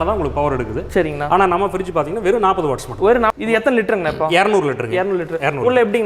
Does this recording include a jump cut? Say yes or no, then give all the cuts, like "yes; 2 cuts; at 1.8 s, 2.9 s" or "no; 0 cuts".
yes; 1 cut; at 3.3 s